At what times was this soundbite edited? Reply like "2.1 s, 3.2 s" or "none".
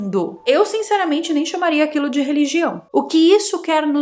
2.9 s